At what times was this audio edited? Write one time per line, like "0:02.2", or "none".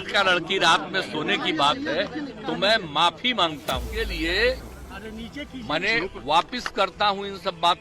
0:03.9